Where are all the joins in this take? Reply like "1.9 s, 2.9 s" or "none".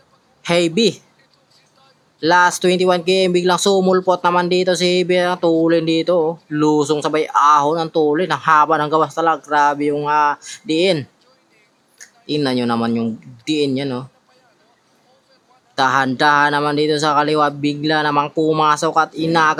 none